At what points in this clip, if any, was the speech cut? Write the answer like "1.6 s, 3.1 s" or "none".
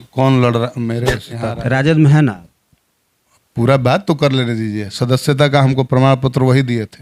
1.3 s